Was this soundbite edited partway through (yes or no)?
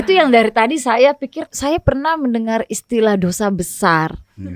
yes